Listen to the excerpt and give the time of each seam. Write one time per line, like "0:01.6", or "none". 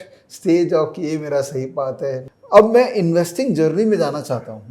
0:02.3